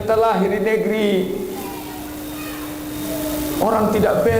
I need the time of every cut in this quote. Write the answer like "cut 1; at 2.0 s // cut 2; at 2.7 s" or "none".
none